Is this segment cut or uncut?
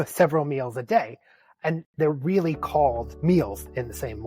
cut